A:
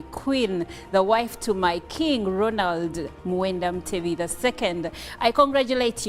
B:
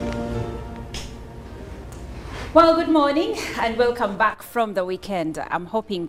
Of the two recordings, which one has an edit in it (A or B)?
A